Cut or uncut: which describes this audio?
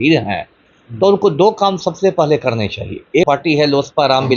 cut